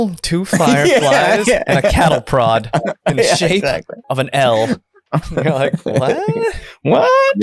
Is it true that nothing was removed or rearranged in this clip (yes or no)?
yes